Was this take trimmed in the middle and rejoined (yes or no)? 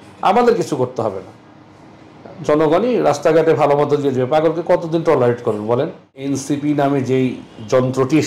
yes